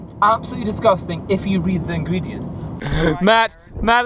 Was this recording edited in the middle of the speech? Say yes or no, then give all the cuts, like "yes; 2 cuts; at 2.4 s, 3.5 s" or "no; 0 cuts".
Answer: yes; 1 cut; at 2.8 s